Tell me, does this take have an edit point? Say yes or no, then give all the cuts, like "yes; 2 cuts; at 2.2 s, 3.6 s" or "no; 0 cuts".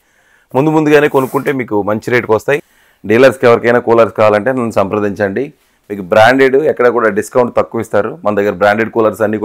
yes; 1 cut; at 2.6 s